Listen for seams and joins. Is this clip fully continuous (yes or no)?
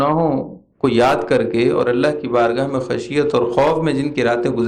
yes